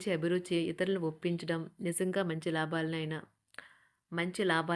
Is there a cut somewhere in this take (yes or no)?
no